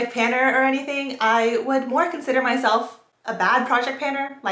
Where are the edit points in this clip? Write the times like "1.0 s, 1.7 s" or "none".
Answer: none